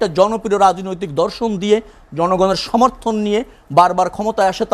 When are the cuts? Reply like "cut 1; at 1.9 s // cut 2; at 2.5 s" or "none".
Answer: none